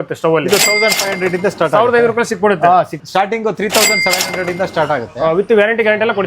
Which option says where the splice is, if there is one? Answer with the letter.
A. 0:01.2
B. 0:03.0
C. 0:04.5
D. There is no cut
B